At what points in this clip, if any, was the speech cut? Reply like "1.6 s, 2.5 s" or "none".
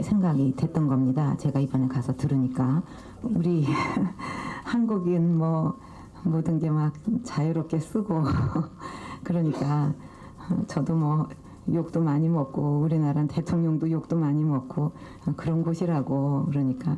4.8 s

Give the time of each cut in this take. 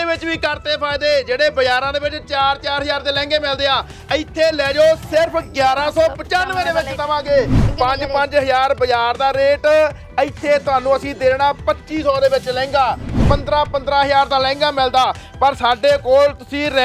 7.6 s, 13.1 s

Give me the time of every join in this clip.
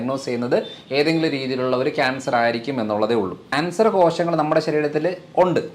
3.5 s

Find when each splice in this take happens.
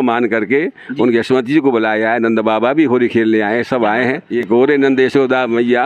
4.3 s

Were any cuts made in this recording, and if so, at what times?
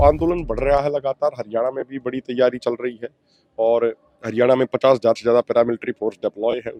none

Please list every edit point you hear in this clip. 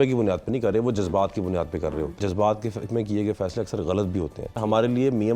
2.2 s, 4.6 s

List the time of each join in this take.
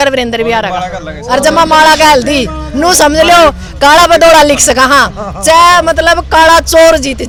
none

